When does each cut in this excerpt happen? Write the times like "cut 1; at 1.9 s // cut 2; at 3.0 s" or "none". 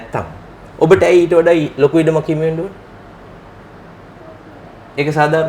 none